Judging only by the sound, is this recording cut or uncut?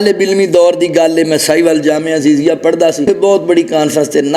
cut